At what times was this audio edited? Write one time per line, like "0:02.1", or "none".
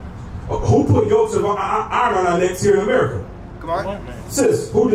none